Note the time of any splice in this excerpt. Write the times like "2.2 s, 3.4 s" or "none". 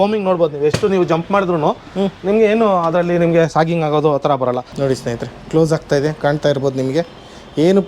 4.7 s